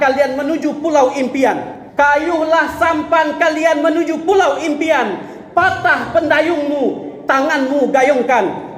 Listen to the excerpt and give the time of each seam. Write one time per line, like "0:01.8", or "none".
0:01.8